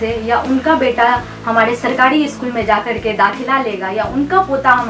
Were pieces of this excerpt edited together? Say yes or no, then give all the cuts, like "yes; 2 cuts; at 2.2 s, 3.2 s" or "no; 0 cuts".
no; 0 cuts